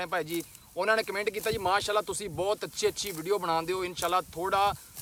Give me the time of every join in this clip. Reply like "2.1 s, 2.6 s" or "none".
none

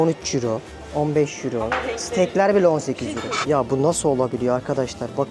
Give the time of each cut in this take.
3.3 s

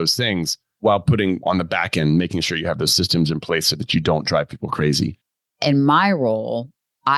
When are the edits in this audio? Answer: 5.4 s

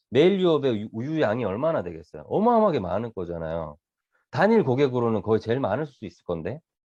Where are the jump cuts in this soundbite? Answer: none

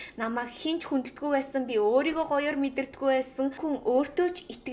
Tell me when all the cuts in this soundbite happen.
3.6 s

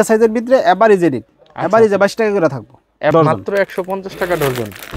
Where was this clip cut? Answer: 3.1 s

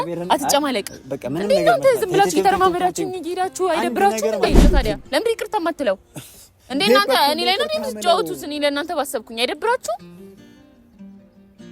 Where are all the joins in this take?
4.5 s

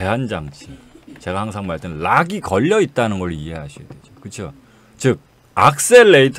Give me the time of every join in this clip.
5.4 s

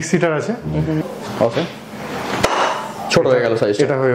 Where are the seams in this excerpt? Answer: 1.0 s

